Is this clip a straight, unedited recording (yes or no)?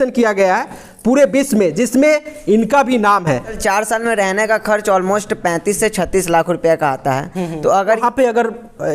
no